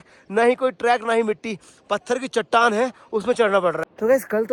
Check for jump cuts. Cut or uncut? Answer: uncut